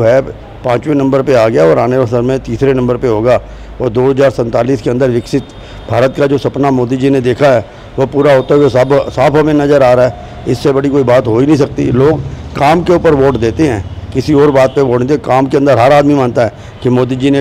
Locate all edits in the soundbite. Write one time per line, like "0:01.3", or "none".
none